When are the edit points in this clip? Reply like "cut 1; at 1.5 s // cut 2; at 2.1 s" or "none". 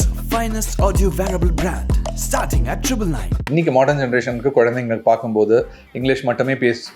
cut 1; at 3.5 s